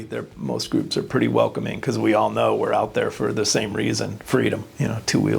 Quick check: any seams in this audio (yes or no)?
no